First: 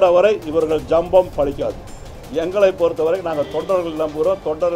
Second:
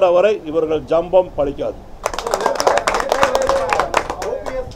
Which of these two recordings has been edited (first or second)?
first